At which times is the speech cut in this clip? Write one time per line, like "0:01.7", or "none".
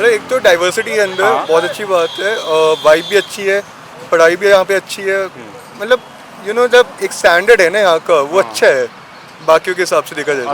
none